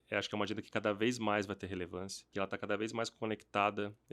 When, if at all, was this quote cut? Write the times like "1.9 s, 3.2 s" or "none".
2.3 s